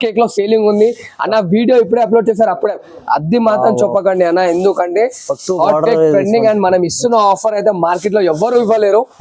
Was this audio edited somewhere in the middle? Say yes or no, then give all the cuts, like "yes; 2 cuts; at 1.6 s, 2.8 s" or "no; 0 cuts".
no; 0 cuts